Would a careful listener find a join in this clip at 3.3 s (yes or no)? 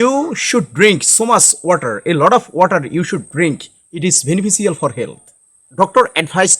no